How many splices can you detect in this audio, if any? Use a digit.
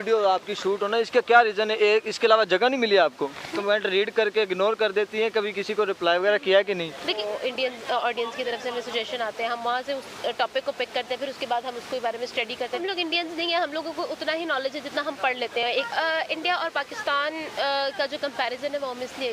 4